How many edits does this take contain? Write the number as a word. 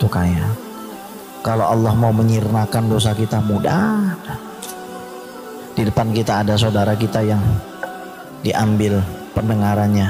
two